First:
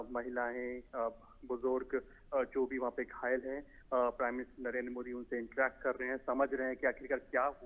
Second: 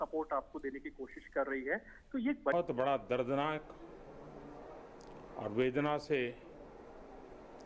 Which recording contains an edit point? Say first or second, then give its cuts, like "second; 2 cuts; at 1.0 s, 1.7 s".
second; 1 cut; at 2.5 s